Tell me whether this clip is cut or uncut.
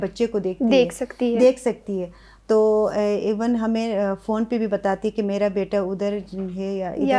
uncut